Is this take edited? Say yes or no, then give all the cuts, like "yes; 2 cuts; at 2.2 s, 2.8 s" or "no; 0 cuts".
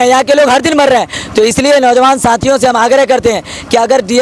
no; 0 cuts